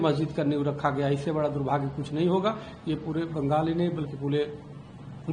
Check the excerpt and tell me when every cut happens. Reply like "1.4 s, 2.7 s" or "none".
none